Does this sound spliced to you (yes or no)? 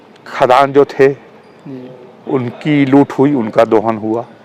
no